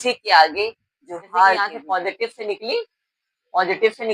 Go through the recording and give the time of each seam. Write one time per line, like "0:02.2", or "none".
0:01.8

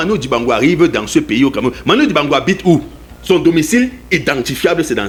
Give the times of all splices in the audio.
none

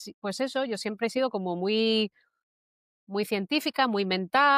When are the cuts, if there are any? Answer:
none

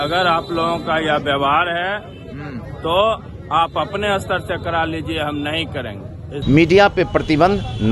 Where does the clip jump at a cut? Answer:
0:06.3

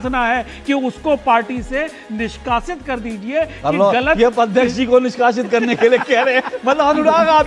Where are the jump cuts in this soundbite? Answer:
none

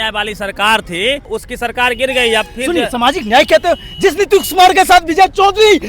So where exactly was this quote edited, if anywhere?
0:01.3

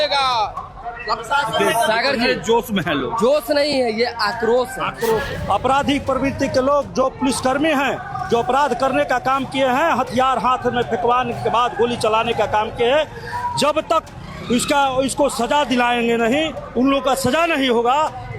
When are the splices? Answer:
0:05.3

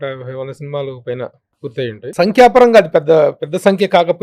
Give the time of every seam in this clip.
0:02.1

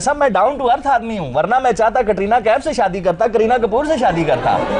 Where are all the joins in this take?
none

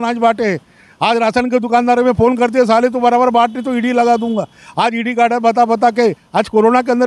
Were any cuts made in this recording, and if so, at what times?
none

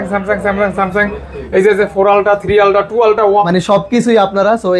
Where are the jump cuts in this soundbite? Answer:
0:03.5

